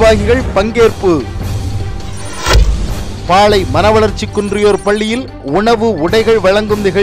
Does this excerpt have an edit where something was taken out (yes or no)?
yes